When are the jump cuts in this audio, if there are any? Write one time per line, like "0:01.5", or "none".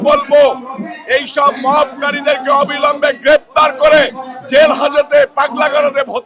none